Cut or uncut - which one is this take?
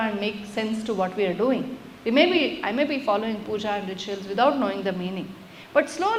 uncut